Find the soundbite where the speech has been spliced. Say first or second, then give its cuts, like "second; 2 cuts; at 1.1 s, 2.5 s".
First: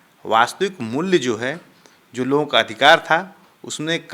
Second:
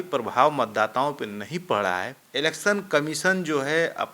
second; 1 cut; at 2.2 s